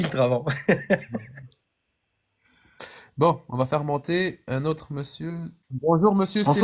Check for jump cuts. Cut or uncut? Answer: uncut